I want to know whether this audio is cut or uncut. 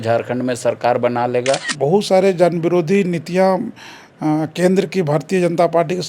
cut